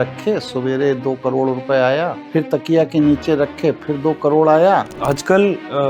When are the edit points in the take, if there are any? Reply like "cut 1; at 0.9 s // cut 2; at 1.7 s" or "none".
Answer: cut 1; at 2.2 s // cut 2; at 4.9 s